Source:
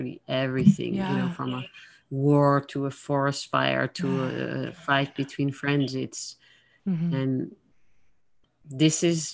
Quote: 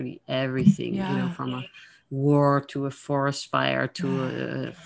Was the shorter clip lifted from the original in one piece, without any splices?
yes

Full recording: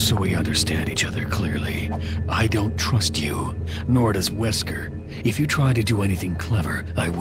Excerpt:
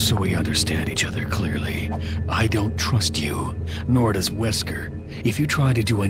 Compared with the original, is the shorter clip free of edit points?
yes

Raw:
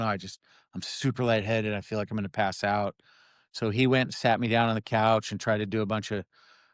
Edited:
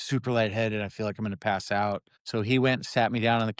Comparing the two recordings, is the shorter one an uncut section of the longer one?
no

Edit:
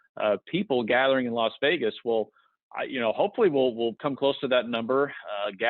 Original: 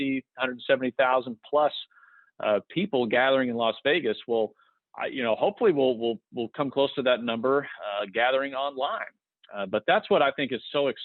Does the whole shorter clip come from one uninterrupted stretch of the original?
no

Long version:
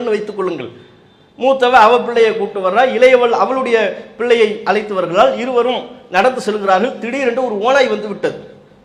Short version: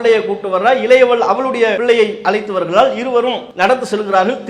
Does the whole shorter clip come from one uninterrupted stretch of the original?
no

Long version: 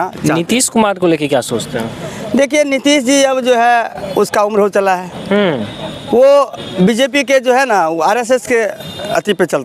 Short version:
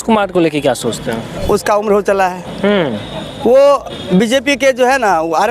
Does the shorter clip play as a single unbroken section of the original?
no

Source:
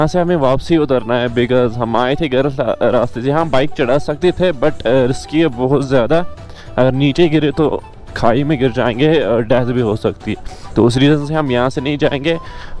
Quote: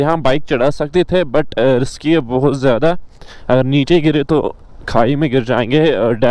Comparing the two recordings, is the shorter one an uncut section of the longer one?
yes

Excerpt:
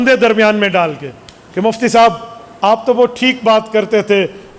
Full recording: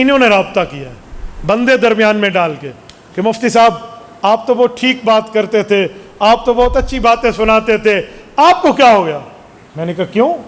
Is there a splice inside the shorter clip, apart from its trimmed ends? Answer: no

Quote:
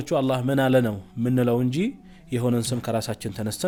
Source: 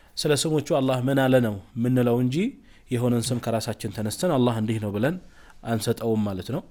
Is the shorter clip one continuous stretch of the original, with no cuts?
yes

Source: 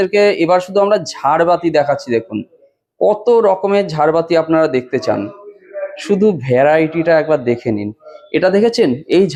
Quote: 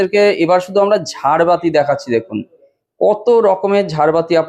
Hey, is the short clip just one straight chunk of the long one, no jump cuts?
yes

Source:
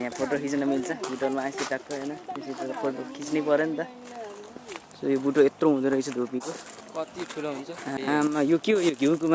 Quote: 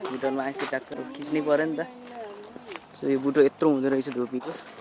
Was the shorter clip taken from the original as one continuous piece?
no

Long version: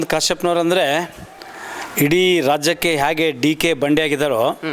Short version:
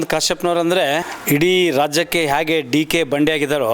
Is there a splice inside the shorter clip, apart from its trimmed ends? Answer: yes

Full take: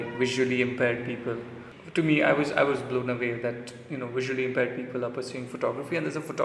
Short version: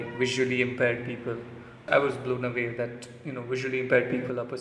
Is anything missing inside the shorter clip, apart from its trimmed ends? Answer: yes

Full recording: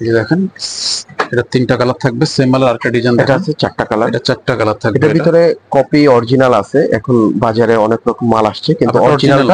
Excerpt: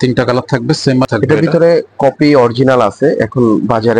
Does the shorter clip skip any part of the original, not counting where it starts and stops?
yes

